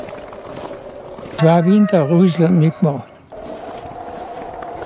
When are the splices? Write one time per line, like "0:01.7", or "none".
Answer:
0:01.3